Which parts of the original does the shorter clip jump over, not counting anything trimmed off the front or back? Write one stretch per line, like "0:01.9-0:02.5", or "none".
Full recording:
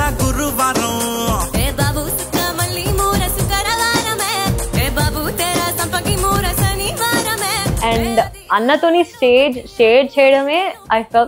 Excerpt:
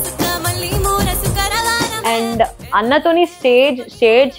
0:04.1-0:07.8